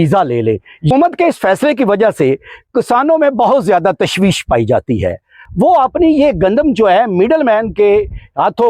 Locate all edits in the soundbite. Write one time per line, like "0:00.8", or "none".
0:00.9
0:05.4

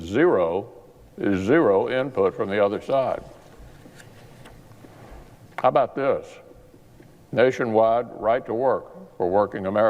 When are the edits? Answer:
0:02.8

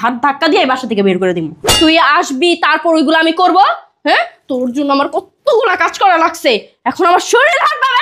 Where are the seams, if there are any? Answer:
0:01.6

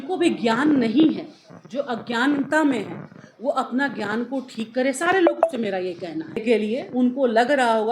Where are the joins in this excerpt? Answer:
0:06.4

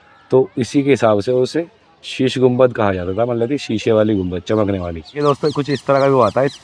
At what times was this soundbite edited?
0:05.2

